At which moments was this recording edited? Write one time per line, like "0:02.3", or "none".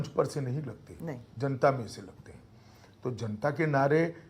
none